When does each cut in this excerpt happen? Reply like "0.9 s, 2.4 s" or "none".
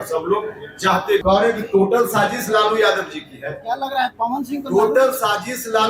1.2 s